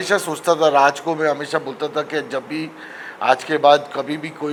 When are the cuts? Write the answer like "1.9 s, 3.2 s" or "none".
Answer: none